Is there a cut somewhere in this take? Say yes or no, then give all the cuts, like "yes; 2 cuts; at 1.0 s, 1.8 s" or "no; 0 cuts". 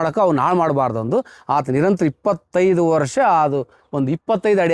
no; 0 cuts